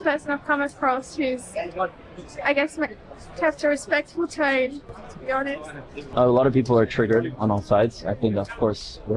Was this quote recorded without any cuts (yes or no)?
yes